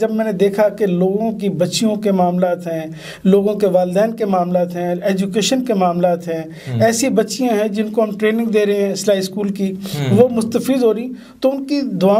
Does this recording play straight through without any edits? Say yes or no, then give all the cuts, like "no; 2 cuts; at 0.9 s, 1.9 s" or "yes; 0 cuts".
yes; 0 cuts